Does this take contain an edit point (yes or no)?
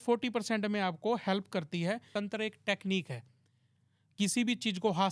yes